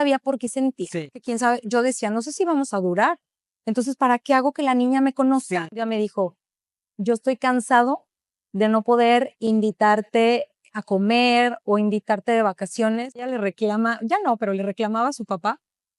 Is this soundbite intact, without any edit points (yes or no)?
no